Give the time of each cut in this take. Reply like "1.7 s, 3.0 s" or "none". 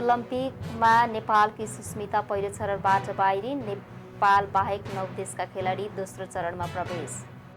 none